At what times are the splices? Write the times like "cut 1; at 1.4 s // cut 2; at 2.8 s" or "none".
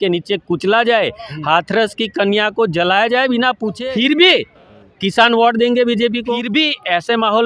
cut 1; at 3.7 s // cut 2; at 6.4 s